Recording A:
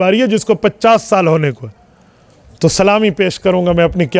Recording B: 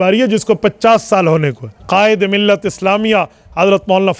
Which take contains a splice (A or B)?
B